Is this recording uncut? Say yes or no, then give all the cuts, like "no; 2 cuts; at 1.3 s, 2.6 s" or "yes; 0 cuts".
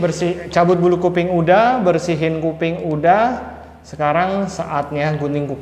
yes; 0 cuts